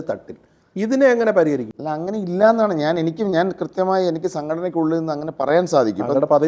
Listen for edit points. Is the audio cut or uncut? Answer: uncut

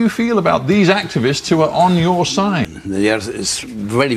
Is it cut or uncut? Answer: cut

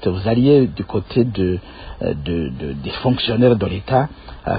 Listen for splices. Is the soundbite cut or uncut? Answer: uncut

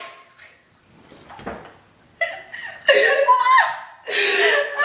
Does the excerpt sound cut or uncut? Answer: uncut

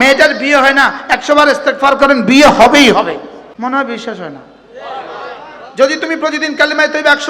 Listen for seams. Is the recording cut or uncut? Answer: cut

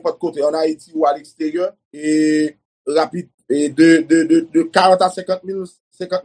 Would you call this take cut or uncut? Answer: cut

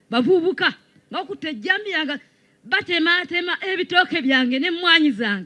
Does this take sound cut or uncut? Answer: uncut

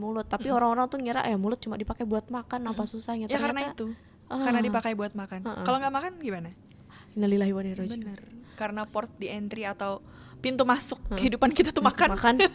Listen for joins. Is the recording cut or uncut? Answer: uncut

